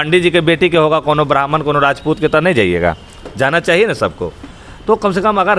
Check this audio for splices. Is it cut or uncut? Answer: uncut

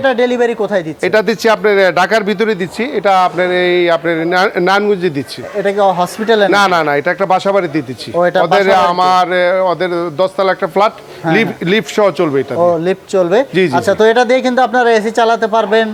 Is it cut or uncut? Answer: uncut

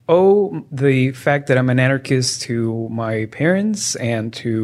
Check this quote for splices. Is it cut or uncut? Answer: uncut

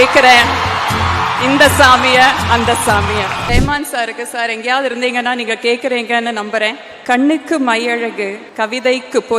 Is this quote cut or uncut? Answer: cut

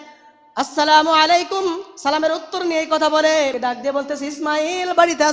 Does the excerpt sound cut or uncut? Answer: uncut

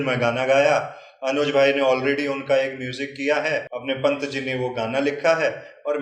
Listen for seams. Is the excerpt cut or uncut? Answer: cut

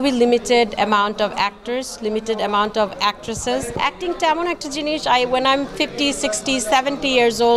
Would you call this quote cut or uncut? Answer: cut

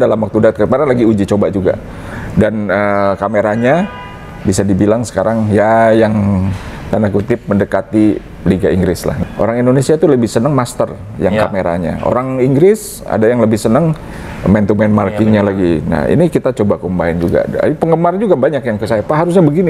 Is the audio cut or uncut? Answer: cut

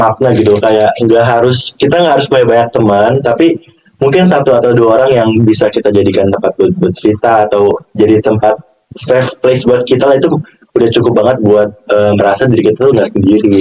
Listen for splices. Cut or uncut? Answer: uncut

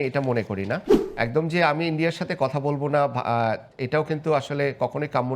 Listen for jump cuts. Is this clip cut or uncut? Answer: cut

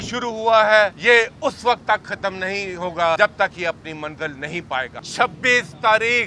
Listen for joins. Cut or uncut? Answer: cut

